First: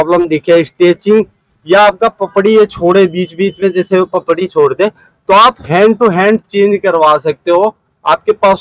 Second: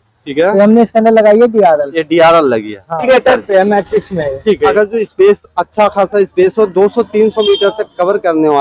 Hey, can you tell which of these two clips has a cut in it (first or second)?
second